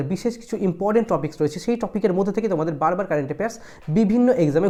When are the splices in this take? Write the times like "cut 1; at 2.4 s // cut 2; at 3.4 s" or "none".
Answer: none